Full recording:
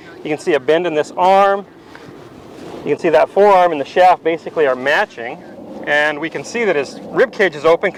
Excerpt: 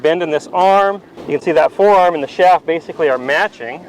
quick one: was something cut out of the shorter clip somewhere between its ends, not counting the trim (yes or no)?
yes